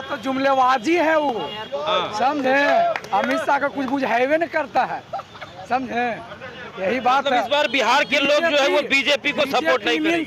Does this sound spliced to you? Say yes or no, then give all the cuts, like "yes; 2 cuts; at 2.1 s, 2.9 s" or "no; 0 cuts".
no; 0 cuts